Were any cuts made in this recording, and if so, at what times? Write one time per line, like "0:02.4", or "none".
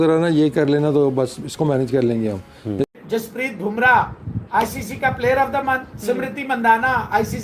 0:02.9